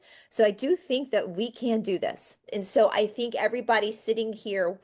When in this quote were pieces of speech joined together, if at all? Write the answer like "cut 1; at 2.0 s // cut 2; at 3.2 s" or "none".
cut 1; at 2.4 s